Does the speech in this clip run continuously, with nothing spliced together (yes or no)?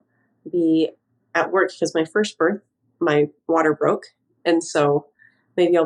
yes